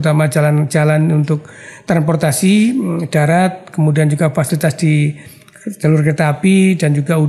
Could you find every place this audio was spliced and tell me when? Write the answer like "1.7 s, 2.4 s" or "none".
none